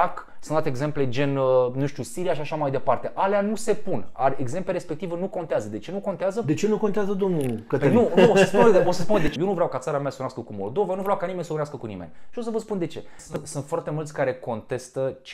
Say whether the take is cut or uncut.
cut